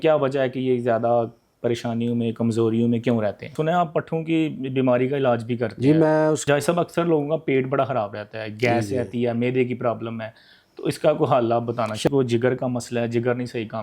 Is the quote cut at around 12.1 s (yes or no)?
yes